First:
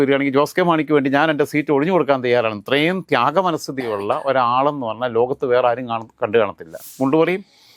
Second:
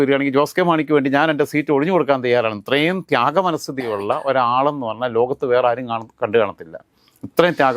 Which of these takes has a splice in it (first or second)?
first